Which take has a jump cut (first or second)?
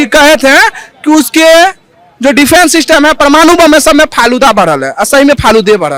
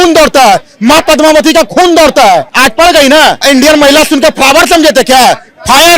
second